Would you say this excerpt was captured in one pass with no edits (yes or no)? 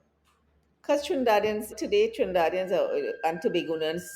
no